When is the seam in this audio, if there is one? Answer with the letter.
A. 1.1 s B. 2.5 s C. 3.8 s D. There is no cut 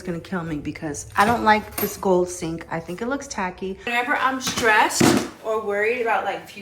C